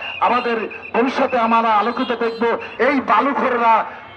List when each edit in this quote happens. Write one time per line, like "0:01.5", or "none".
0:02.7